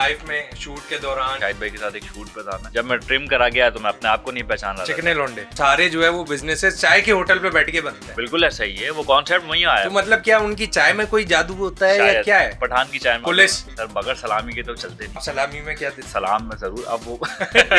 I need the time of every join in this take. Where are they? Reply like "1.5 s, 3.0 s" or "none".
1.4 s, 2.6 s, 5.5 s, 13.2 s, 15.2 s